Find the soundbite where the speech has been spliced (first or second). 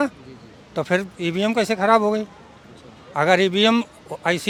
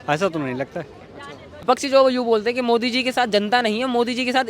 second